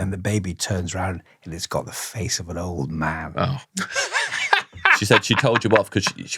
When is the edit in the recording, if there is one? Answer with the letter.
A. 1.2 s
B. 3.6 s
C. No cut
B